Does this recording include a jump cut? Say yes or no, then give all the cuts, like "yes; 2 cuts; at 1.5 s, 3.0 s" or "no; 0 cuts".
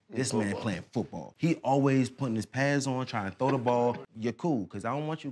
yes; 2 cuts; at 1.2 s, 4.1 s